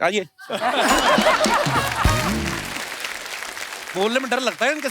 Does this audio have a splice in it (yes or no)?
no